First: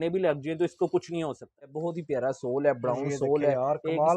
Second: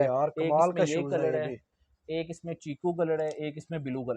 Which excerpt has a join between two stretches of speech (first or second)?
first